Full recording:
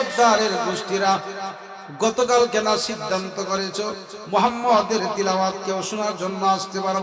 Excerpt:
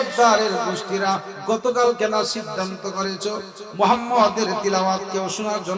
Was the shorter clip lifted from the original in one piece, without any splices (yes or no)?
no